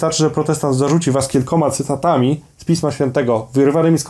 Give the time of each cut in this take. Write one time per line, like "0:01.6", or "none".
none